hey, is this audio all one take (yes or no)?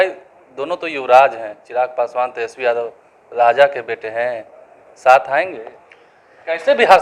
yes